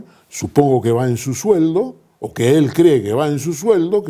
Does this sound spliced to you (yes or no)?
no